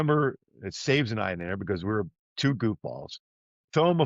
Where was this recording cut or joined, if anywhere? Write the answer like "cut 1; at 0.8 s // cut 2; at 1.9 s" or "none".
none